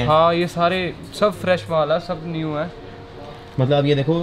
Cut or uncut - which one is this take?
uncut